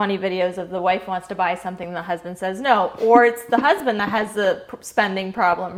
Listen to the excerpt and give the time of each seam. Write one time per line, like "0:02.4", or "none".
none